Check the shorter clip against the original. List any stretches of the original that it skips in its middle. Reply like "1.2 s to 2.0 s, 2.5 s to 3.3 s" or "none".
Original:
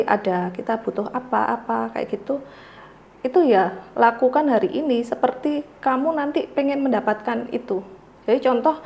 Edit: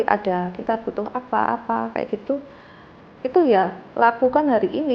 none